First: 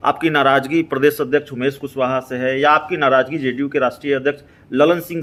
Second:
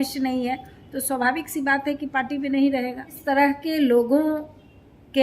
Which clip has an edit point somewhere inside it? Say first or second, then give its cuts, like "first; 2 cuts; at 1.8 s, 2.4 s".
second; 1 cut; at 3.2 s